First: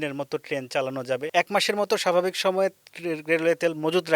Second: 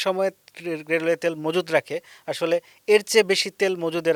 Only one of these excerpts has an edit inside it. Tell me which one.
first; 1 cut; at 1.3 s

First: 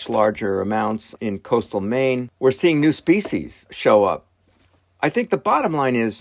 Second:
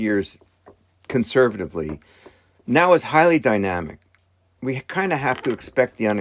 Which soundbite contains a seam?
first; 3 cuts; at 1.1 s, 2.3 s, 3.7 s

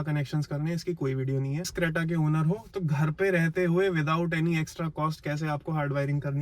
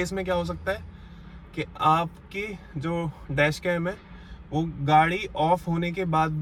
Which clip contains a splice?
first; 1 cut; at 1.7 s

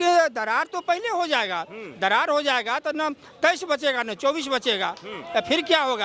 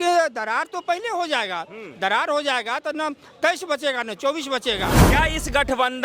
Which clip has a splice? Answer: second; 1 cut; at 5.0 s

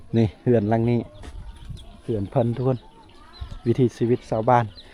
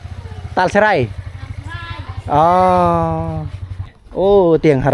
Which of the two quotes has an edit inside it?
second; 1 cut; at 4.0 s

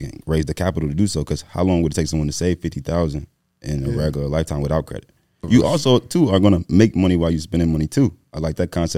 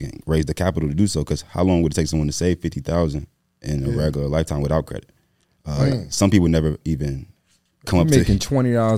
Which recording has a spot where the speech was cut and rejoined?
first; 1 cut; at 5.4 s

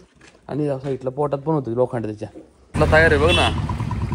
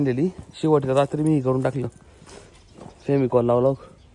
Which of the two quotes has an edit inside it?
first; 1 cut; at 2.7 s

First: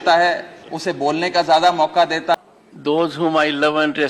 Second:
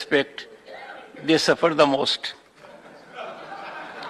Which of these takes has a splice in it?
first; 1 cut; at 2.3 s

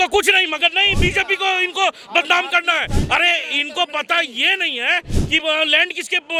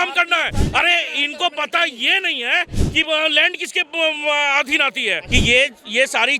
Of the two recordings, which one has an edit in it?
second; 1 cut; at 5.2 s

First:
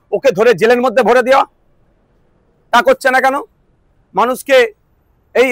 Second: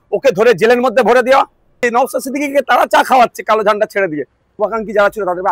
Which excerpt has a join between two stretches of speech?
second; 2 cuts; at 1.8 s, 4.4 s

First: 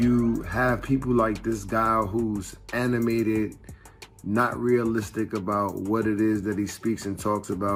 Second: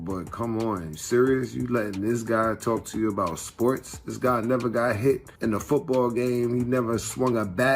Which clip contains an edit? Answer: second; 1 cut; at 5.3 s

